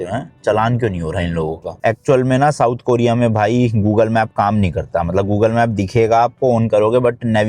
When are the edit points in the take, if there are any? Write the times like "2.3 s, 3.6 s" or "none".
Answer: 1.8 s